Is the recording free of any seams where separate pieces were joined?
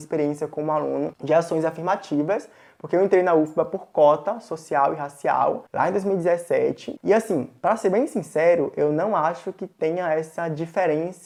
yes; 0 cuts

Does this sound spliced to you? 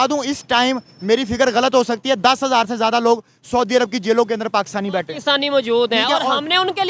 no; 0 cuts

